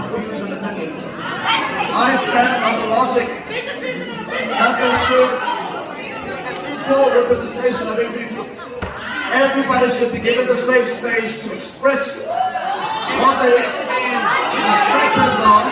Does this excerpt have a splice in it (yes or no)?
no